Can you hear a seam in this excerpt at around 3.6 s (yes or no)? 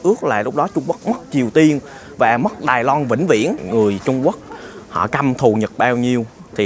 yes